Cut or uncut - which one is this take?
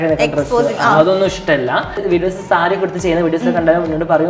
cut